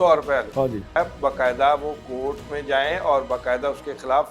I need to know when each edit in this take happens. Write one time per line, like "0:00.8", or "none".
0:01.0

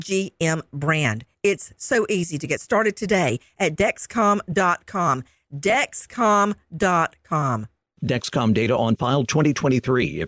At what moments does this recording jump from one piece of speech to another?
none

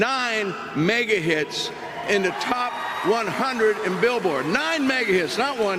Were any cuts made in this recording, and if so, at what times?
none

